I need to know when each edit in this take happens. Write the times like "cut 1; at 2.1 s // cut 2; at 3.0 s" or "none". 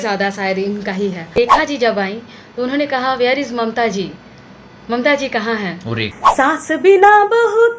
cut 1; at 1.3 s // cut 2; at 6.1 s

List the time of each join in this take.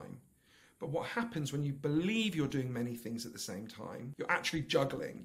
cut 1; at 4.1 s

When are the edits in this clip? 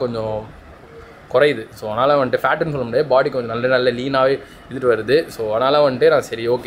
none

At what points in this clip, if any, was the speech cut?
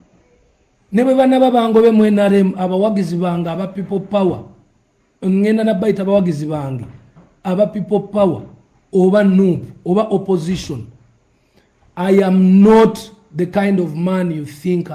none

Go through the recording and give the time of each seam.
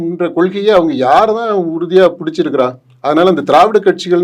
none

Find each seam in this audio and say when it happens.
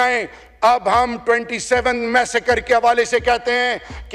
none

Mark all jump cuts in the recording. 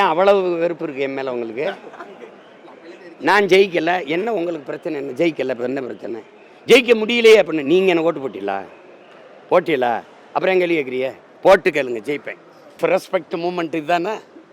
cut 1; at 12.8 s

